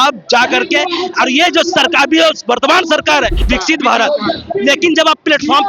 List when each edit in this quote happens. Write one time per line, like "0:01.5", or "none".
0:03.4